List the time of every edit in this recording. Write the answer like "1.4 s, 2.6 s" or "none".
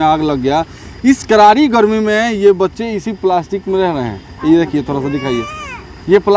none